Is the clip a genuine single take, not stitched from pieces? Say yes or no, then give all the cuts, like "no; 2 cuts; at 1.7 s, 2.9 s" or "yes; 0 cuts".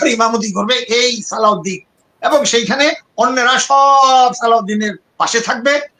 yes; 0 cuts